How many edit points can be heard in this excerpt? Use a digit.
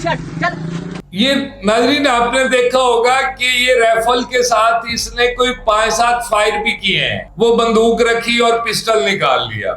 2